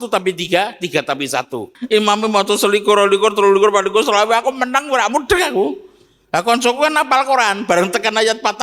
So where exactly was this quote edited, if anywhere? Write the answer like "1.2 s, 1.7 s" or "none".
1.7 s